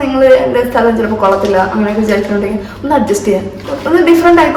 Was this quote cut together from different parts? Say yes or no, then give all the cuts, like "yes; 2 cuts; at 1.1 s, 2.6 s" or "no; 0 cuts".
no; 0 cuts